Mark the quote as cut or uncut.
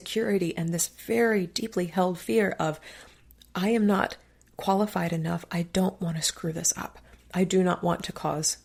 uncut